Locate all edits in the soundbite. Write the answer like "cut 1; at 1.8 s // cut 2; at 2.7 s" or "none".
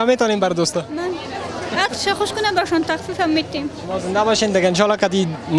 none